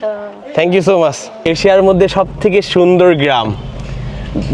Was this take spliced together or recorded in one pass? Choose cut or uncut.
cut